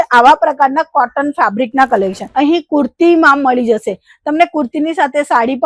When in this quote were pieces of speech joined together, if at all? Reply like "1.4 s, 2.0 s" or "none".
2.2 s